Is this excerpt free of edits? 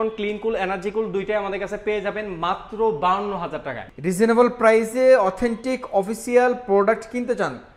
no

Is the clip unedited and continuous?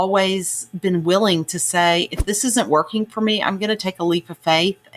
yes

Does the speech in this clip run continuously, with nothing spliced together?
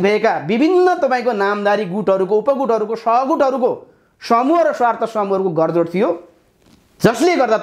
yes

